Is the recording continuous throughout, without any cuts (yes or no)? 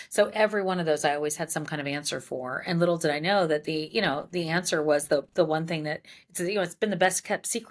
yes